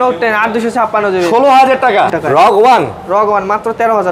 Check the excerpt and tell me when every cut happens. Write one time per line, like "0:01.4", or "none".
0:02.1